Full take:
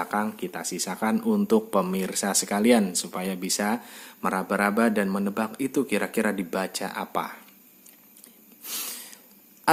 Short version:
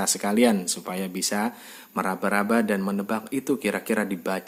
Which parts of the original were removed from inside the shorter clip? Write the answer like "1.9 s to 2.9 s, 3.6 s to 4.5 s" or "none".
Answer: none